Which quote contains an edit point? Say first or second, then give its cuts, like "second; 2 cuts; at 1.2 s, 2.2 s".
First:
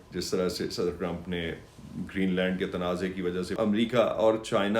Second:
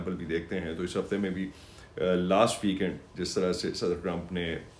first; 1 cut; at 3.5 s